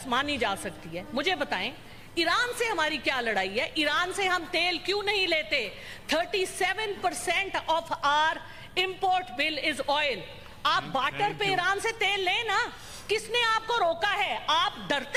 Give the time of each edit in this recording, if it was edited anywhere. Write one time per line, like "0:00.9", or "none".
none